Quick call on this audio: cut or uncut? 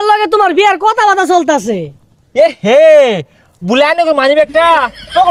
uncut